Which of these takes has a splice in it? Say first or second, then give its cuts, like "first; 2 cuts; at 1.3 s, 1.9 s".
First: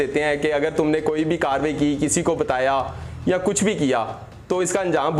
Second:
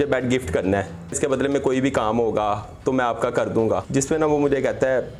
second; 2 cuts; at 1.1 s, 3.8 s